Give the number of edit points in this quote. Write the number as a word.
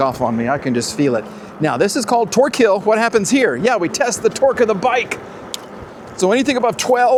zero